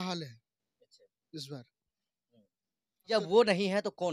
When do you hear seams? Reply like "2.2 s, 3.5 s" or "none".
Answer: 3.1 s